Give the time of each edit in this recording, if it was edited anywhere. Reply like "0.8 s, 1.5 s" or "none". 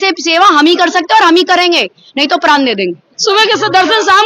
3.1 s